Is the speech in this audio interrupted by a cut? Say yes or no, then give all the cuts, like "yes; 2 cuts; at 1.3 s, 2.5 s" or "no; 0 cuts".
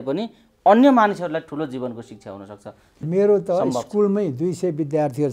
yes; 1 cut; at 3.0 s